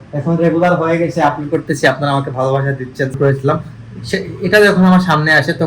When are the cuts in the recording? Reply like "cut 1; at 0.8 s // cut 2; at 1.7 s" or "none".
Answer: cut 1; at 3.2 s